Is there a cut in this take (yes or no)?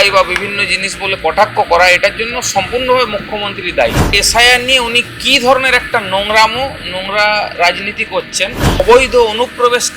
yes